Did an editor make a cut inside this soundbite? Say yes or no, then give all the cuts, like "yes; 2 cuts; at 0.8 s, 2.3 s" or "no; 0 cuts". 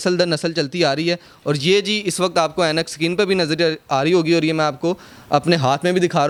no; 0 cuts